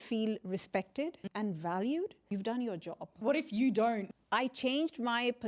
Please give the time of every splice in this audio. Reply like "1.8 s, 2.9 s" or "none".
1.2 s, 2.3 s, 3.1 s, 4.1 s

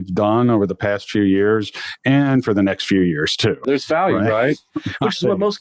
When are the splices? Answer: 3.6 s

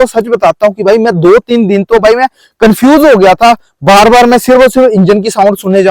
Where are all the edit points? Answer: none

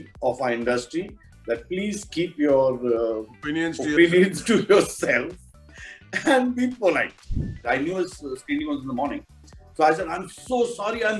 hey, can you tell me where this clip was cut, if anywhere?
7.6 s

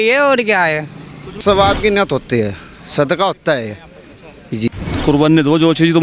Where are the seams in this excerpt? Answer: 1.4 s, 4.7 s

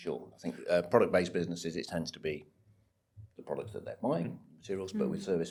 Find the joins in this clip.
none

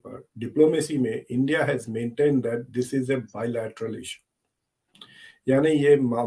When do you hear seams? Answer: none

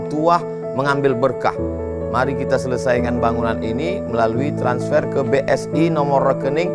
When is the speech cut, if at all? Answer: none

